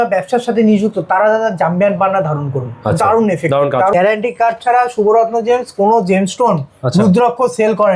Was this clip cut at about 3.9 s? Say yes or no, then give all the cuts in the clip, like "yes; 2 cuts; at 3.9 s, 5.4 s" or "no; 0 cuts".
yes; 1 cut; at 3.9 s